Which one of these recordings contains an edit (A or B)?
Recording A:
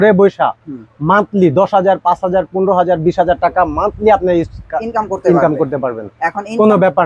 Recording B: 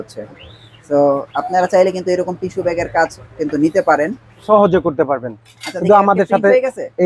B